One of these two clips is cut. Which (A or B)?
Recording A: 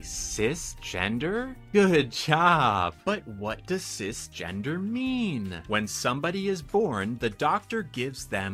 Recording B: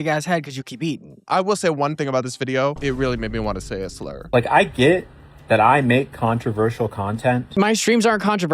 B